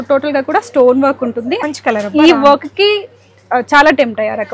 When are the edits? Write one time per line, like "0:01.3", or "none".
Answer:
0:01.6